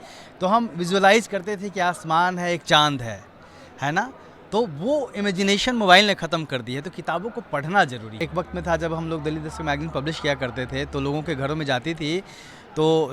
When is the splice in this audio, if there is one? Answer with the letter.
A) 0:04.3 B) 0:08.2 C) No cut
B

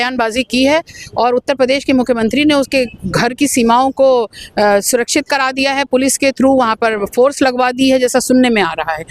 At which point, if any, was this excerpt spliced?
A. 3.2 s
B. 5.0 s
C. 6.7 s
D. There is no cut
D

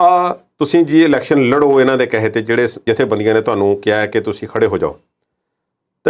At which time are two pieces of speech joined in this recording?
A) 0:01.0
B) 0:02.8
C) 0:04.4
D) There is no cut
B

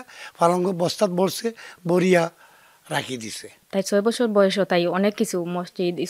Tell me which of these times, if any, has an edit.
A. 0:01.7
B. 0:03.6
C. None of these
B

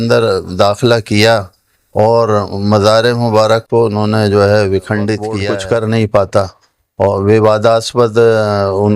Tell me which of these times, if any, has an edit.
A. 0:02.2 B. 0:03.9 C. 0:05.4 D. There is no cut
C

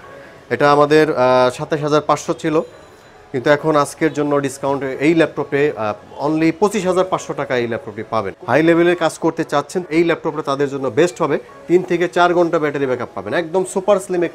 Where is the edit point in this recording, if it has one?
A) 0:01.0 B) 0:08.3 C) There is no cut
B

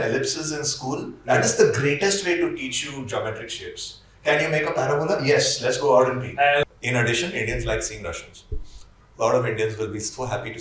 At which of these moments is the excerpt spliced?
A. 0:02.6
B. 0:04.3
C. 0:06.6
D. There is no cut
C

